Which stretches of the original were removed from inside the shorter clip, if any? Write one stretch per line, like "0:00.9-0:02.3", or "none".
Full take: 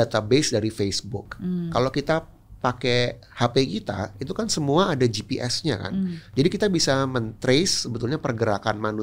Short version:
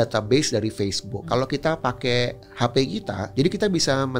0:01.4-0:02.2
0:04.0-0:06.2